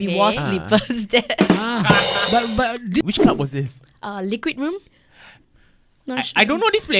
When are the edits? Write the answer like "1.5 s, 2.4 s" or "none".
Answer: 3.0 s

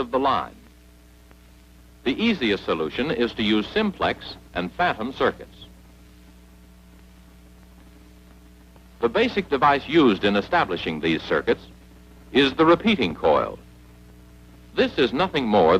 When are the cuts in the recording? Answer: 6.7 s

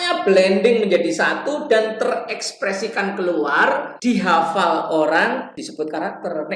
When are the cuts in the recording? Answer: 3.9 s, 5.6 s

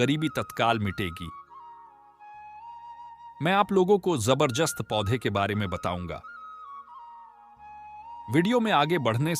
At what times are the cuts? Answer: 6.7 s, 8.3 s

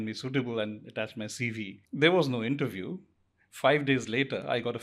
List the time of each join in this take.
1.8 s

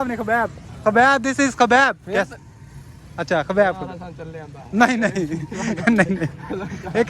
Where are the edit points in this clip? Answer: 5.1 s

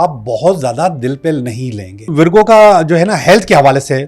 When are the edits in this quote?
2.1 s

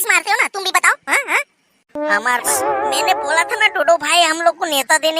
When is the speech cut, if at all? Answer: 2.5 s

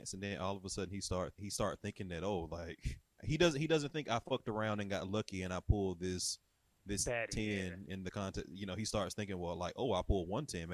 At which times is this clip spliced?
1.3 s, 3.2 s

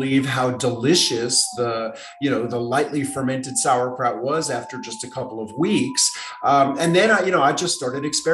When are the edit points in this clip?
none

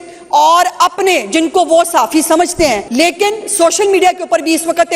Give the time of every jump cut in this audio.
2.8 s

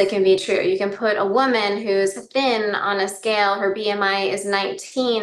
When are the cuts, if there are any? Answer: none

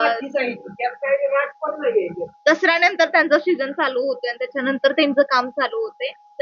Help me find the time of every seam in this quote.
none

